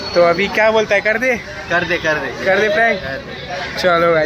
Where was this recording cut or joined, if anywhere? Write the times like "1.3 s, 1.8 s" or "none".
none